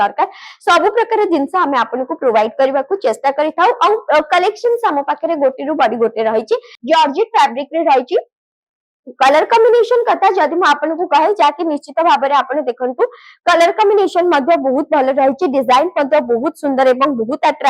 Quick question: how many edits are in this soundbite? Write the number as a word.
one